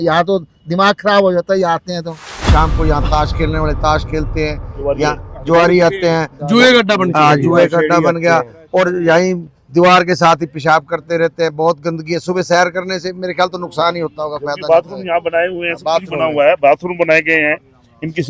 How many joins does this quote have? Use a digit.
1